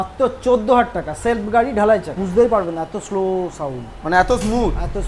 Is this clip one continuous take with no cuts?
no; 1 cut; at 2.2 s

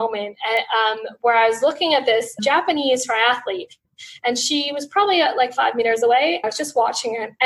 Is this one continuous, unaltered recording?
no; 1 cut; at 6.5 s

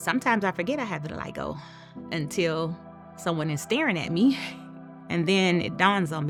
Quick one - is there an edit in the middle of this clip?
no; 0 cuts

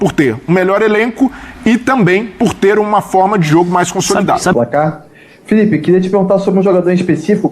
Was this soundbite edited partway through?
yes; 1 cut; at 4.5 s

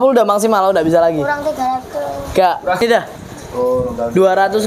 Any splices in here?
yes; 1 cut; at 2.8 s

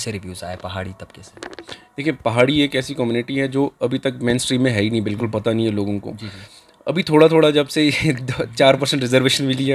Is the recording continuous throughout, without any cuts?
yes; 0 cuts

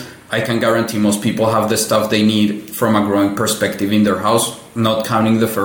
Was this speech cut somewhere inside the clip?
no; 0 cuts

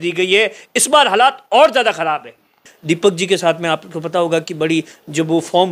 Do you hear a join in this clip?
yes; 1 cut; at 2.6 s

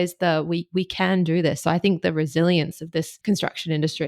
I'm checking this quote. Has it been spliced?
yes; 1 cut; at 3.1 s

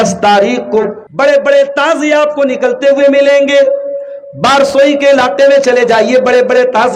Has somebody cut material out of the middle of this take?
yes; 1 cut; at 1.0 s

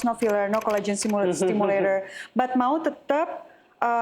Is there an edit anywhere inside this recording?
no; 0 cuts

